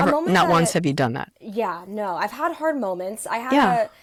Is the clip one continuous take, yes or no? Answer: yes